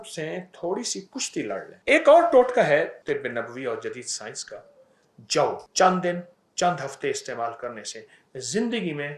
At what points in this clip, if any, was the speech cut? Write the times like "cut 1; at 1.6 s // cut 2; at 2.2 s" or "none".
cut 1; at 1.7 s // cut 2; at 3.0 s // cut 3; at 5.6 s